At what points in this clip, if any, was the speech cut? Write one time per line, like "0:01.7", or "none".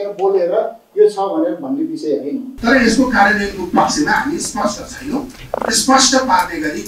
0:02.5

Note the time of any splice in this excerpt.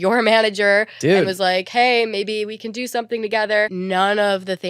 0:03.7

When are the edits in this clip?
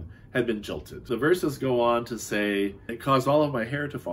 0:01.1
0:02.9

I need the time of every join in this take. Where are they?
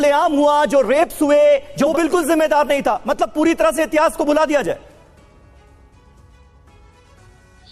0:01.9

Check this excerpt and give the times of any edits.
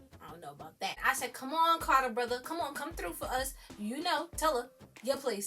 0:01.0

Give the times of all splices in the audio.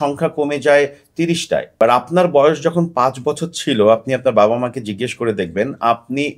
0:01.7

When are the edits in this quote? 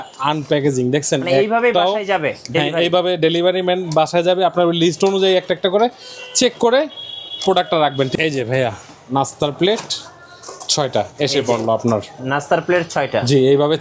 0:08.1

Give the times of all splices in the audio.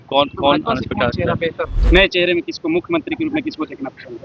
0:01.7

